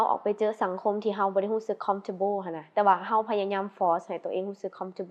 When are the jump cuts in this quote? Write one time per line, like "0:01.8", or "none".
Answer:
none